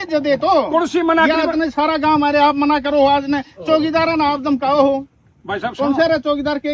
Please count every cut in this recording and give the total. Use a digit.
0